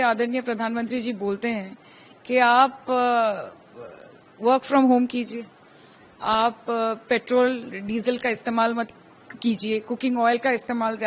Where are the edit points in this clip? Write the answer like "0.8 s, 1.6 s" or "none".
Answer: none